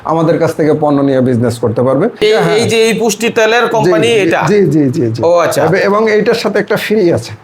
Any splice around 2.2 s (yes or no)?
yes